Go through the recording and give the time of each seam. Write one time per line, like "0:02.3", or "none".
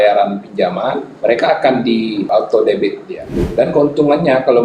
0:01.1
0:02.3
0:03.4